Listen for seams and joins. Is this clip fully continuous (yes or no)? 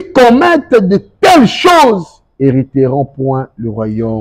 yes